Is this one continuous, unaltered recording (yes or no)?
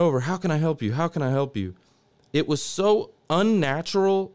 yes